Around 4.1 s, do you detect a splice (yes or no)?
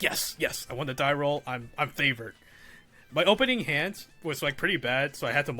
yes